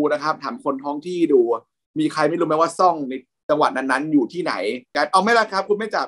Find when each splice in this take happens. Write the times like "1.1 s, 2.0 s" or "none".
4.9 s